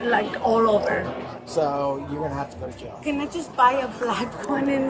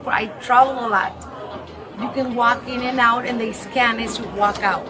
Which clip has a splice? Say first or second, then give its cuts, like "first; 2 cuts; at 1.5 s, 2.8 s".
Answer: first; 1 cut; at 1.3 s